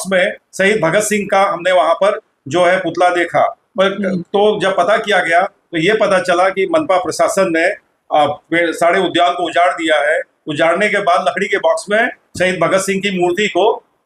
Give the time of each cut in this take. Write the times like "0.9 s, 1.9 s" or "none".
none

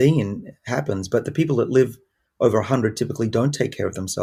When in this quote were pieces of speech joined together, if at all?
none

